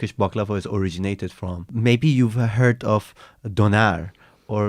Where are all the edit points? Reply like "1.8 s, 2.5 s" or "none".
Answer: 1.7 s